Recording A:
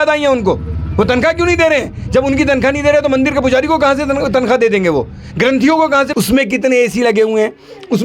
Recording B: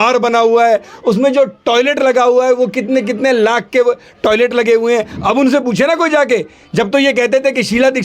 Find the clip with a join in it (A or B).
A